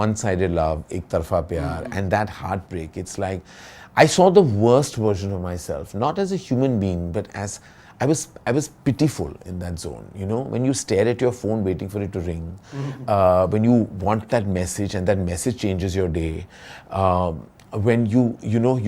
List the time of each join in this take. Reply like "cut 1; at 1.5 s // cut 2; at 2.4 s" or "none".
none